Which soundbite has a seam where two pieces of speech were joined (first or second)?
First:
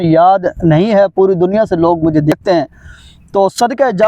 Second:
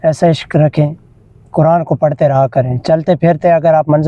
first